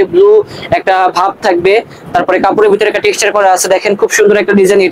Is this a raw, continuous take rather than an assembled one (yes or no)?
yes